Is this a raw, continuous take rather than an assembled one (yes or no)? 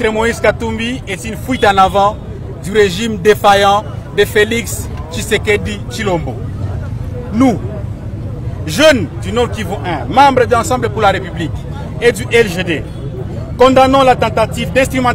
yes